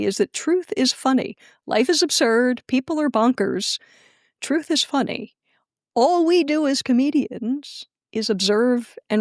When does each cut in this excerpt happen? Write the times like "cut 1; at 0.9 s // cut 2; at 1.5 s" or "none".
none